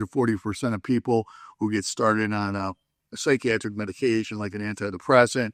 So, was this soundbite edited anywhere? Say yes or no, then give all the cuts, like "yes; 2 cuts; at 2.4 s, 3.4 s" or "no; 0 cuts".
no; 0 cuts